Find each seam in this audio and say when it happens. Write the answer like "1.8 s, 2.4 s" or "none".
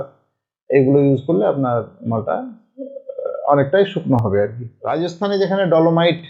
4.2 s